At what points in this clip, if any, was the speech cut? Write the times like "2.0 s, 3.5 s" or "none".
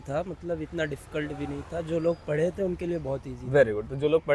none

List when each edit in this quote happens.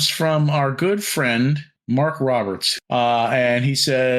1.7 s, 2.6 s

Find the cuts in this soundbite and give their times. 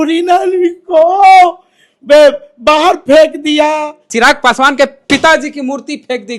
4.0 s

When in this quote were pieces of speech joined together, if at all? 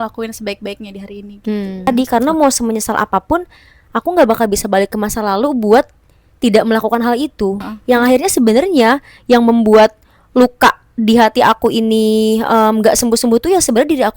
1.9 s, 7.7 s

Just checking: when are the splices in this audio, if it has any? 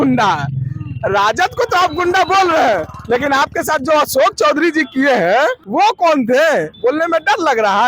5.6 s, 6.7 s

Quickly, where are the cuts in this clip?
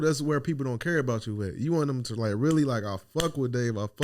none

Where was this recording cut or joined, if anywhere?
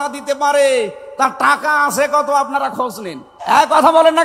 3.3 s

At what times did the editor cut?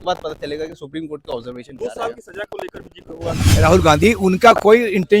3.4 s

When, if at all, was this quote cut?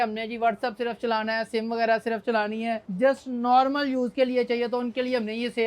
2.8 s

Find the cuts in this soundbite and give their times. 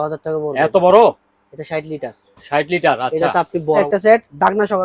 3.8 s

